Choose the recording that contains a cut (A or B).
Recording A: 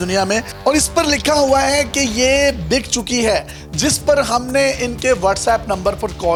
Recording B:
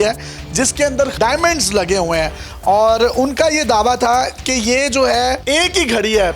B